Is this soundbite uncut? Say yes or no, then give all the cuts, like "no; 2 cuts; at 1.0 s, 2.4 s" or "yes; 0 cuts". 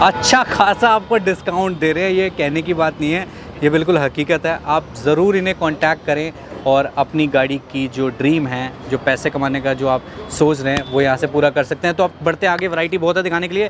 yes; 0 cuts